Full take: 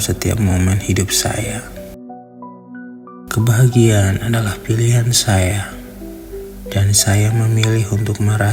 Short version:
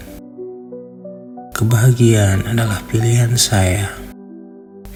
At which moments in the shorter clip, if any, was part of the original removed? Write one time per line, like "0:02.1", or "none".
none

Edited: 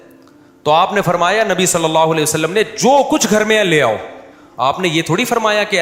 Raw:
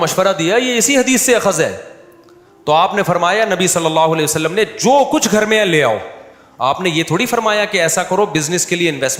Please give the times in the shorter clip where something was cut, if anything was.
none

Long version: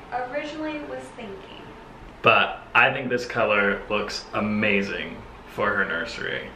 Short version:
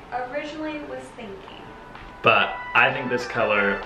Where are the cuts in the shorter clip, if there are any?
none

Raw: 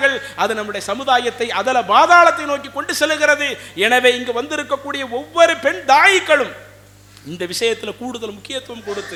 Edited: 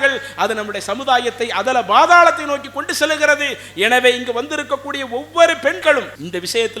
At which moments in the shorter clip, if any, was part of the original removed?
0:05.8

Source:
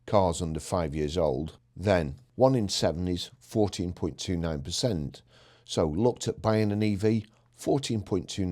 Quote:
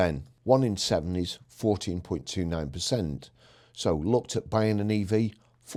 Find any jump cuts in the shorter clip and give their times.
none

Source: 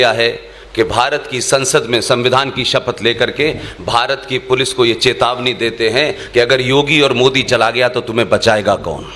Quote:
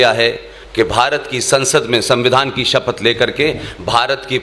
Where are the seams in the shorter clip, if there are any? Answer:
none

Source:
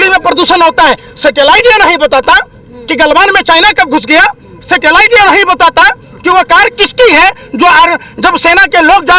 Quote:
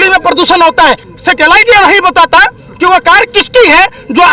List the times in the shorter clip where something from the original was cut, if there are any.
0:01.1

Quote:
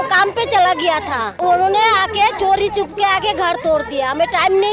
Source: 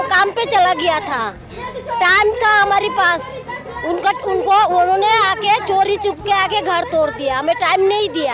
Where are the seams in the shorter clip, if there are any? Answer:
0:01.4

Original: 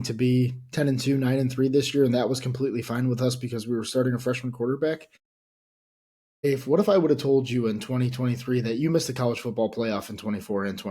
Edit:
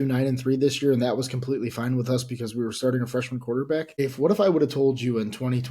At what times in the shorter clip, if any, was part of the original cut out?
0:04.0

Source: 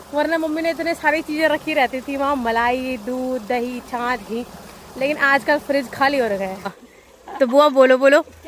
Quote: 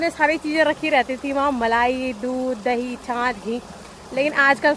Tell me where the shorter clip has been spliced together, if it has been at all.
none

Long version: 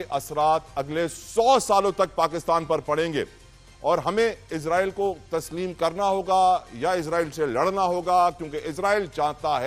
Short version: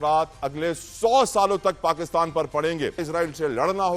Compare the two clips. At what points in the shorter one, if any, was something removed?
0:03.0

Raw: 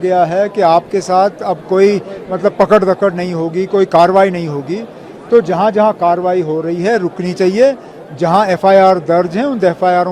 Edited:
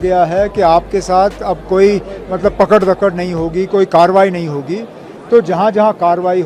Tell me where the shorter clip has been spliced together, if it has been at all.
none

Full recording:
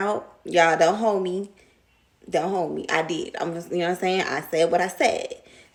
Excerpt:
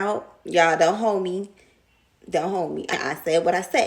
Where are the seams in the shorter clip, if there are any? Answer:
0:02.9

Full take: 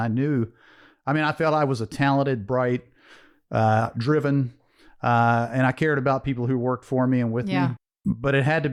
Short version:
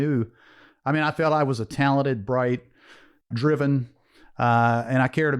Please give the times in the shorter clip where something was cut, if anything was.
0:03.3

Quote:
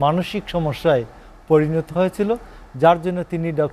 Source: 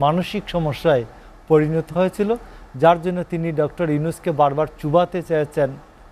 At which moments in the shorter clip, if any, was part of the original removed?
none

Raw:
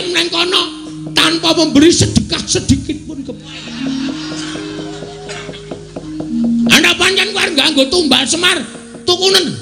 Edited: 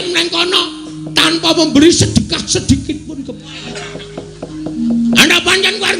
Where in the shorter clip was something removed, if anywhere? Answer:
0:03.6

